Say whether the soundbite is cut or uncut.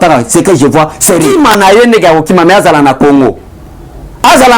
cut